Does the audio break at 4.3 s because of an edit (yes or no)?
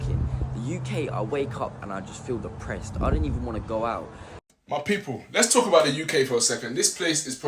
yes